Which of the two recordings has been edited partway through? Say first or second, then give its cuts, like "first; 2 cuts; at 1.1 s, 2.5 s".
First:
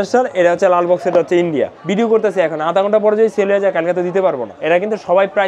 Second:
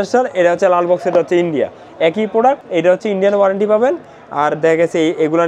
first; 2 cuts; at 1.8 s, 4.5 s